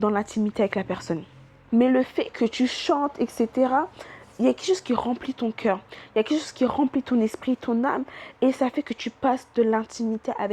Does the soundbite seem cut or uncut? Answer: cut